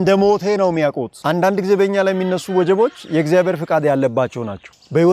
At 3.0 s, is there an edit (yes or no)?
no